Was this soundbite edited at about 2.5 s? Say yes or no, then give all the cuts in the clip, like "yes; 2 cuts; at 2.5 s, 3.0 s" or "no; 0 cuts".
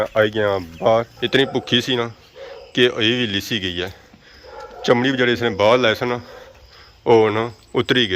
no; 1 cut; at 1.2 s